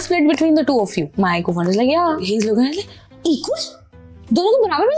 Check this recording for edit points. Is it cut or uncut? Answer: cut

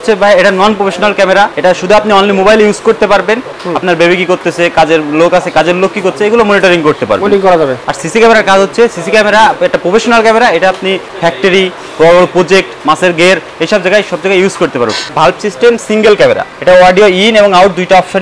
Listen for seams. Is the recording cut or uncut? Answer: cut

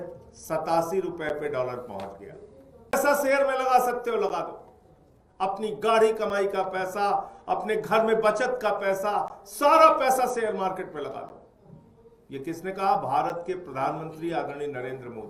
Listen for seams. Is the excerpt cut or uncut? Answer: cut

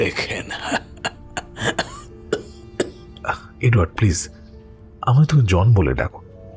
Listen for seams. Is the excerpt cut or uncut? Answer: cut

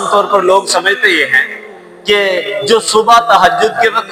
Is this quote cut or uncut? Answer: uncut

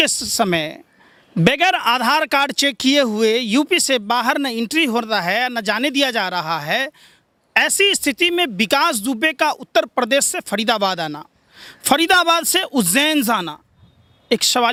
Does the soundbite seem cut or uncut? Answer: uncut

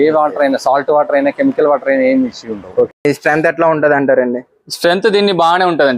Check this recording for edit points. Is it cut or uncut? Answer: cut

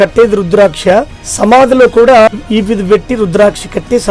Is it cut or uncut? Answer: cut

